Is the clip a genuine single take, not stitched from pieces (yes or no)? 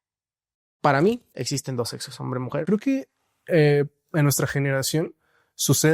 no